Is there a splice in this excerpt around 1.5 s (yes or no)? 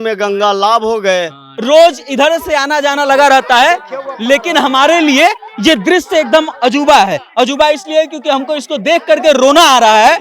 yes